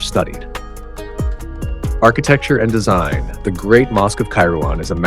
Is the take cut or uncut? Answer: cut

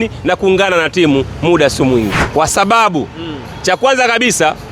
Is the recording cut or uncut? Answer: cut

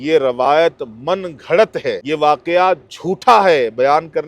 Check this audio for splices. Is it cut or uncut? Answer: cut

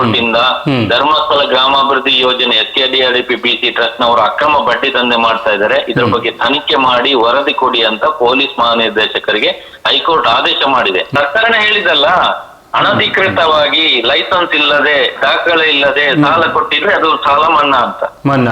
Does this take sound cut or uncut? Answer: cut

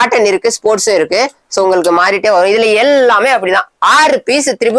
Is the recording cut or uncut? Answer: uncut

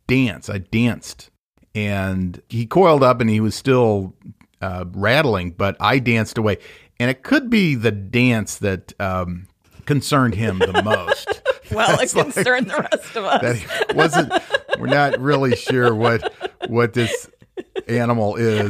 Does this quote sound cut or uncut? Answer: cut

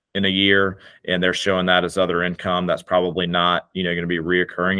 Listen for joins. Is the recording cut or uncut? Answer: uncut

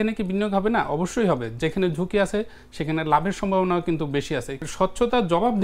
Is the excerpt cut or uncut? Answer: cut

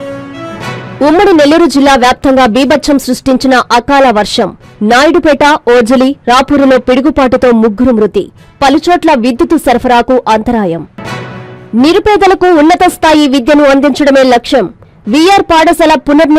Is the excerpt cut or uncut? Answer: uncut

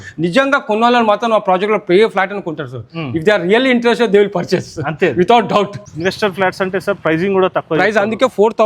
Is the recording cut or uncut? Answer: cut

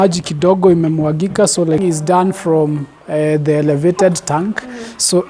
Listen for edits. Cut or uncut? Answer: cut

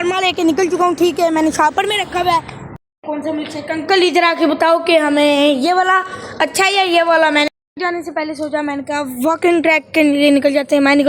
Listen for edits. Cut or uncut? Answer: cut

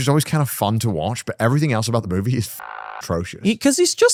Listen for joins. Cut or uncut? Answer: uncut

